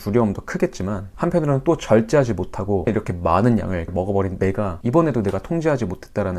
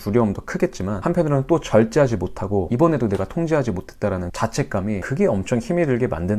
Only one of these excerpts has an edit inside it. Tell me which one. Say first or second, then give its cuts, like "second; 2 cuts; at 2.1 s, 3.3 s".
second; 3 cuts; at 1.0 s, 2.7 s, 4.4 s